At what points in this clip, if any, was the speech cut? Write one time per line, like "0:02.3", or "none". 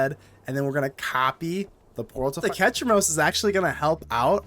0:02.4